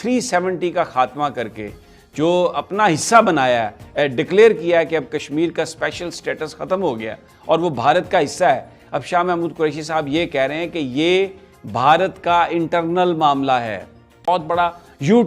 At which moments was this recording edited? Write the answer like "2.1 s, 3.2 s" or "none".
14.3 s